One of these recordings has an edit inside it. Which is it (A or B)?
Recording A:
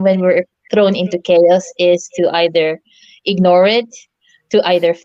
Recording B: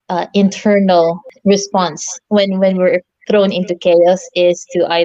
B